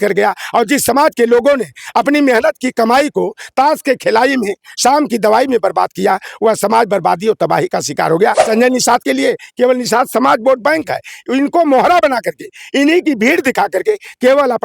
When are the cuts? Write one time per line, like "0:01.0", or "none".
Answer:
0:08.4